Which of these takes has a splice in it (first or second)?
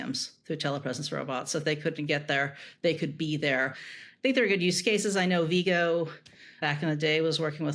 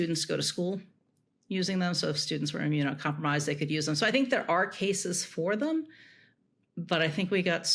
first